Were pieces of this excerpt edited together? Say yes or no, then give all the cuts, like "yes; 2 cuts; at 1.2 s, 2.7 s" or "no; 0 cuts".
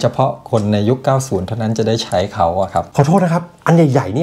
yes; 1 cut; at 2.9 s